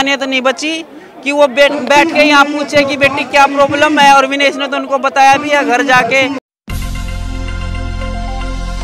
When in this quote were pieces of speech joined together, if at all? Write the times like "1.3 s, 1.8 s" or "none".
6.4 s